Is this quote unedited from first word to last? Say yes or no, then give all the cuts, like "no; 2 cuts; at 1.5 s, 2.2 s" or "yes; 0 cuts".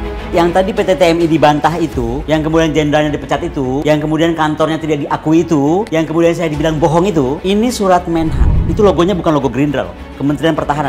yes; 0 cuts